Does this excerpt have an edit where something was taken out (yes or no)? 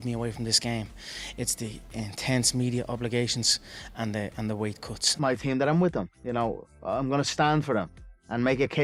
no